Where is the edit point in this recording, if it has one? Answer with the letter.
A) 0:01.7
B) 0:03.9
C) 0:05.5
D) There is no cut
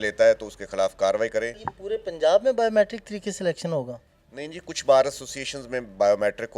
A